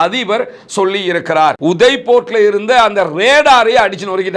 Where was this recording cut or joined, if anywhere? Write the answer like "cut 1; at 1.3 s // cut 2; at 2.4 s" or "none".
cut 1; at 1.5 s